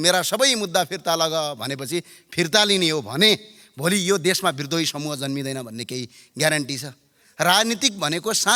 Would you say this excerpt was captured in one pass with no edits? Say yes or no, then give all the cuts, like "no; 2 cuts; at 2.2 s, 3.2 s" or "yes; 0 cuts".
yes; 0 cuts